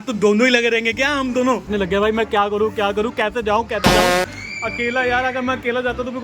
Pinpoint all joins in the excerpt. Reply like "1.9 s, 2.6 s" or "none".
1.5 s, 3.8 s, 4.4 s

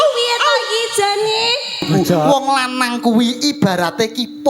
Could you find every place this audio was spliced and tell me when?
2.3 s

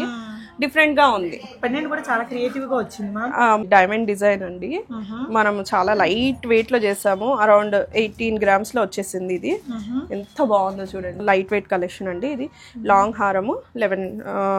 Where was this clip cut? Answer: 3.6 s, 11.2 s

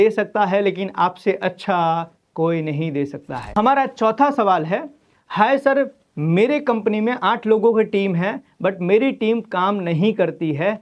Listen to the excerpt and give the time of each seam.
3.4 s

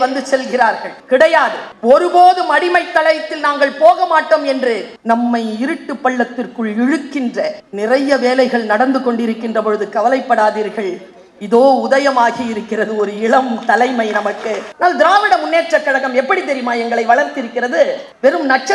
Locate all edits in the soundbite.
4.9 s, 14.7 s

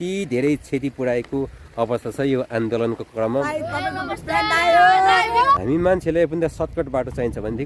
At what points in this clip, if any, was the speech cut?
3.3 s, 5.6 s

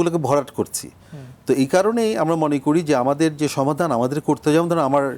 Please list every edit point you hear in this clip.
none

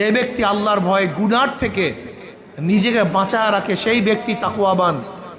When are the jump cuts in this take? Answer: none

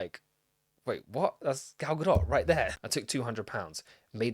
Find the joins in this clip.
2.7 s

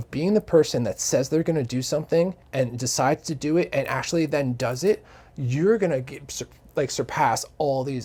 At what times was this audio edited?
none

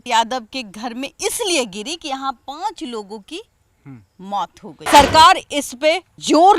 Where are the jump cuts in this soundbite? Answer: 4.8 s

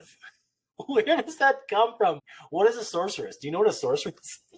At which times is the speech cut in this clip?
2.2 s

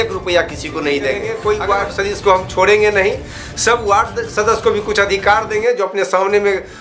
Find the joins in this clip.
1.3 s

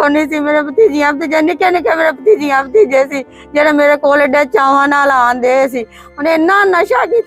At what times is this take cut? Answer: none

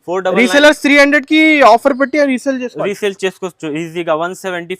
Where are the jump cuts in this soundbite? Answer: none

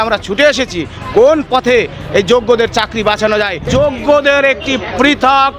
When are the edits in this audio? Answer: 3.6 s

